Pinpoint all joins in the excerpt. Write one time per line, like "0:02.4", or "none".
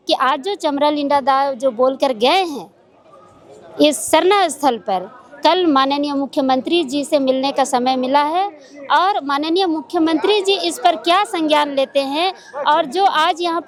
none

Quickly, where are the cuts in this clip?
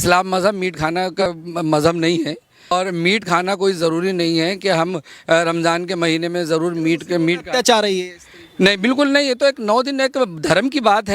0:01.2
0:02.7

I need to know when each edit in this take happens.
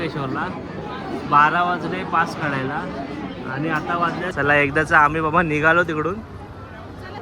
0:04.3

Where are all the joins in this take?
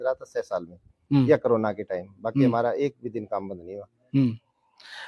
none

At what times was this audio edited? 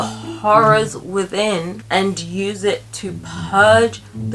0:01.8

